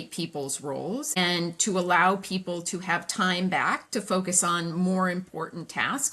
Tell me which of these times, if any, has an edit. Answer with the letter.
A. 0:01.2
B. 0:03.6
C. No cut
A